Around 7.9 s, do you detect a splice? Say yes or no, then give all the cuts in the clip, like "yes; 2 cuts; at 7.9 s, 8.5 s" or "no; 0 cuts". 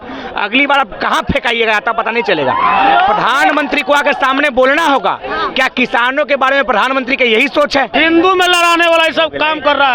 yes; 1 cut; at 7.9 s